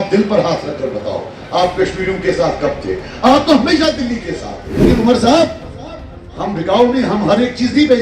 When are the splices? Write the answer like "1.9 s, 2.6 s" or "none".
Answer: 4.9 s